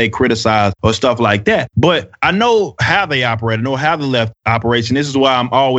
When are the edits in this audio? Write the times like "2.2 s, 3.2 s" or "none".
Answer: none